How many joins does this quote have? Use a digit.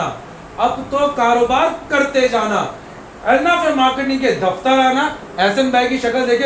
0